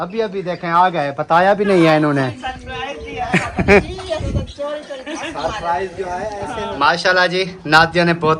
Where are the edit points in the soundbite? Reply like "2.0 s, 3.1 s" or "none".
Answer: 6.7 s